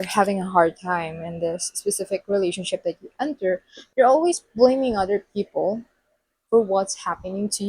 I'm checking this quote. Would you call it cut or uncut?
cut